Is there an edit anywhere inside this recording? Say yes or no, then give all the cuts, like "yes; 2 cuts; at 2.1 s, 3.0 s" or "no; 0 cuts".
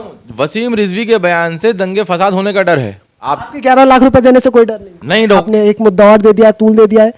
yes; 2 cuts; at 3.3 s, 5.4 s